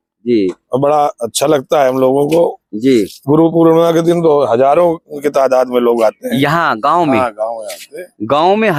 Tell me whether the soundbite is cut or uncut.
uncut